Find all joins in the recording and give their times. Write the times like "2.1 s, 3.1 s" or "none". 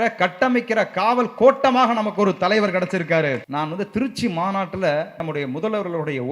3.5 s, 5.2 s